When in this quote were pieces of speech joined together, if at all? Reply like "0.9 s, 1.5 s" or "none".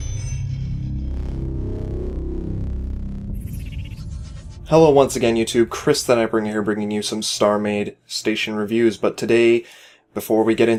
none